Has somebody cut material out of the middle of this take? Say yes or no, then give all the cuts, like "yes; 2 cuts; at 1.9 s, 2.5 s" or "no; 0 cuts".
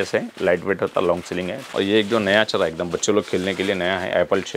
yes; 1 cut; at 1.6 s